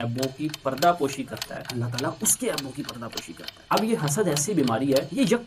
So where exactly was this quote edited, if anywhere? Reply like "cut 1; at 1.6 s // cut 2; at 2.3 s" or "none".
cut 1; at 3.5 s